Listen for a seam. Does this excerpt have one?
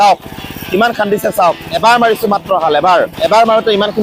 yes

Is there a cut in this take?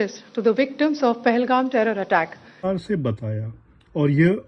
yes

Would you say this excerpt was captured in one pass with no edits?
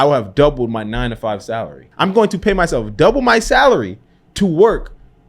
no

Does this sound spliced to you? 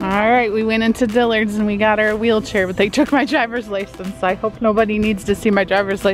no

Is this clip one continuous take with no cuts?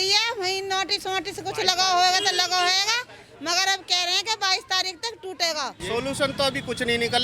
no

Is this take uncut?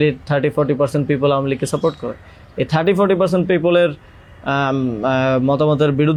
yes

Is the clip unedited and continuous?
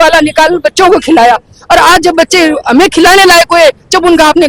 yes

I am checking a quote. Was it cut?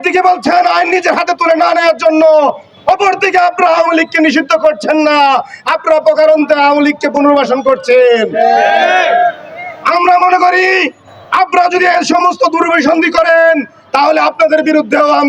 no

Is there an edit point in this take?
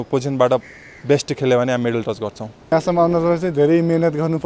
yes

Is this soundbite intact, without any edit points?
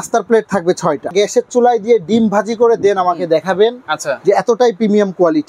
no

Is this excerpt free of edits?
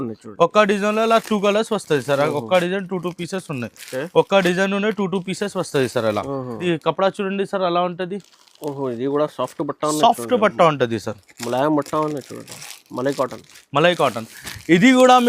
no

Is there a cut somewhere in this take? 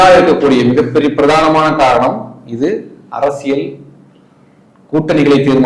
no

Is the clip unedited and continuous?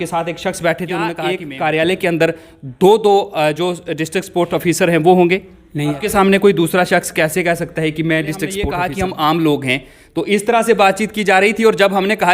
no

